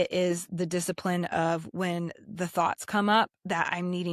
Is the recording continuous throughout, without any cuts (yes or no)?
yes